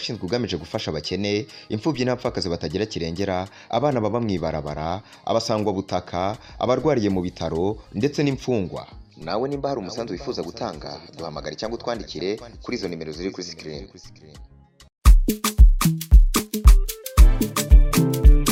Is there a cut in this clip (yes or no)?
no